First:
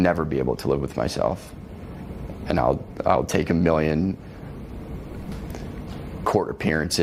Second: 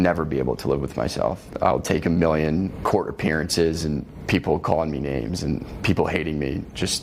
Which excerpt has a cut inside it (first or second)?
second